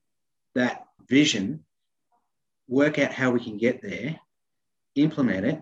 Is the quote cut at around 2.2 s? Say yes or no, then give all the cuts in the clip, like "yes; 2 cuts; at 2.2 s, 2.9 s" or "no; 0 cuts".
no; 1 cut; at 1.0 s